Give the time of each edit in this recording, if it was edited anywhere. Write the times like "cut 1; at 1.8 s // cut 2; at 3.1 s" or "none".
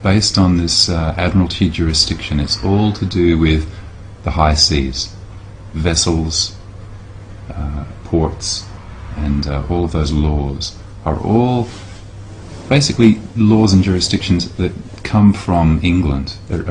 cut 1; at 13.3 s